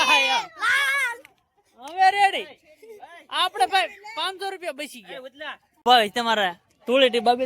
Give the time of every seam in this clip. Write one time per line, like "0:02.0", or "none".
0:05.8